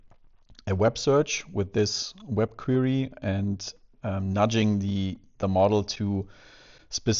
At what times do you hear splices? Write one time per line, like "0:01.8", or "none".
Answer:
none